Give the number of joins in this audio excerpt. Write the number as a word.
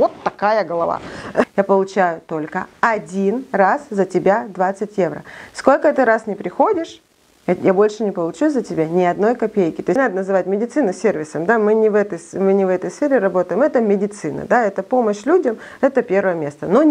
two